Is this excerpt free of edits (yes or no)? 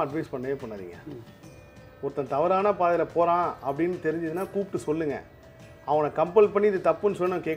yes